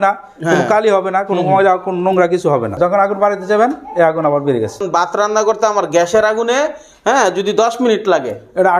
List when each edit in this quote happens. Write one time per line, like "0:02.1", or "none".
0:02.8
0:04.8